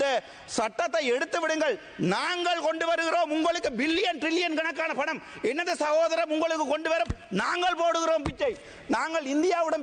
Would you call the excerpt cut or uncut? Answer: uncut